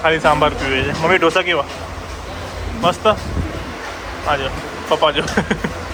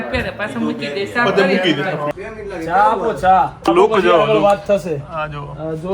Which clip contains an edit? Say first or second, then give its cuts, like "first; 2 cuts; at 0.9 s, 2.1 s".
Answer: second; 2 cuts; at 2.1 s, 3.7 s